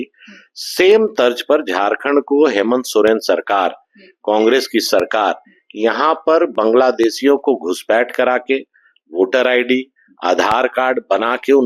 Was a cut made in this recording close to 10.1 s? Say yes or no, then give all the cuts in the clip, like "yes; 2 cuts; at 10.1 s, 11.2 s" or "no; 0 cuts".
no; 0 cuts